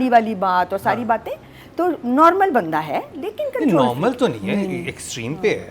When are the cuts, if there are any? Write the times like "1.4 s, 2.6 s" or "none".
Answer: none